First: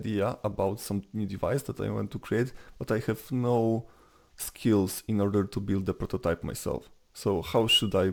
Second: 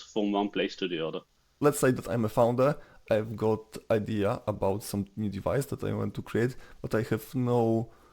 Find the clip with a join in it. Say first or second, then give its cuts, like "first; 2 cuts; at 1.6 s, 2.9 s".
second; 1 cut; at 1.4 s